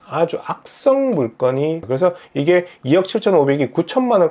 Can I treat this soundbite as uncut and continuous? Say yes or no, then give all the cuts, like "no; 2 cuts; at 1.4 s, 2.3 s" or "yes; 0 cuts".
no; 1 cut; at 1.8 s